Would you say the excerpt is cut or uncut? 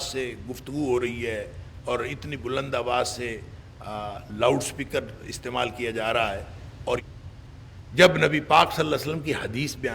cut